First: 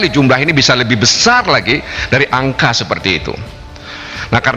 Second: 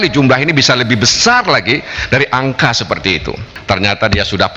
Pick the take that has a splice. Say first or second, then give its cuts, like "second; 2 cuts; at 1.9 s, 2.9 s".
second; 1 cut; at 3.5 s